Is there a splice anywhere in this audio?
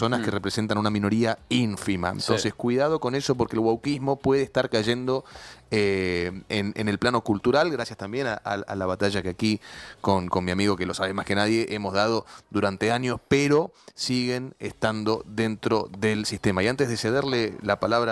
no; 0 cuts

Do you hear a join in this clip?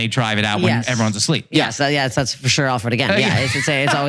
no; 0 cuts

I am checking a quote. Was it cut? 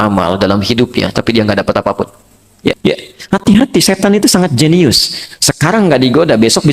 yes; 1 cut; at 2.8 s

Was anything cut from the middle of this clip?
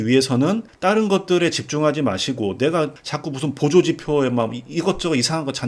yes; 1 cut; at 3.0 s

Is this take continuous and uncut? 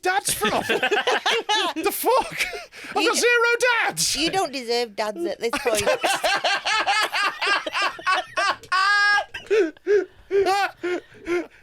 yes; 0 cuts

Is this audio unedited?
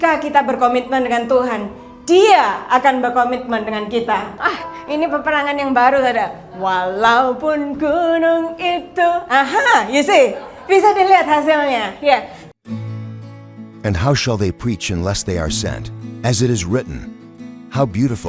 no; 2 cuts; at 4.3 s, 12.4 s

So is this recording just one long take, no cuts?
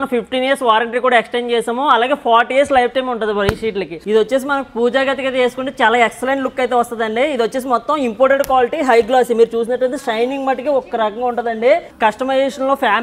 no; 2 cuts; at 4.0 s, 11.9 s

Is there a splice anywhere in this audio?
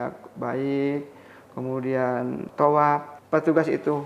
yes; 2 cuts; at 2.5 s, 3.1 s

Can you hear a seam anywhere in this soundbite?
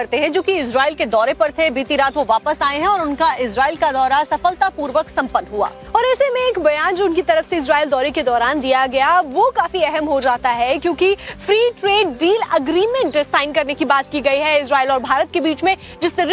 no; 0 cuts

